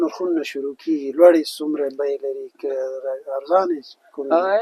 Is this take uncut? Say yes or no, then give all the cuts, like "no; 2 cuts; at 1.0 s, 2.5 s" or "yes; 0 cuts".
yes; 0 cuts